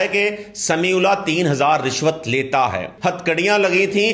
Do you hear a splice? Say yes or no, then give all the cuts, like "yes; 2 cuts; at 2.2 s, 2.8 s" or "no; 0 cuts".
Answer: yes; 1 cut; at 2.9 s